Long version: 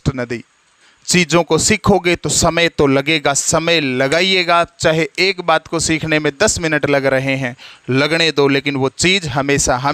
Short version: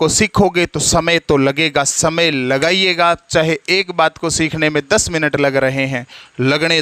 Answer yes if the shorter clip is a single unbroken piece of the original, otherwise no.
yes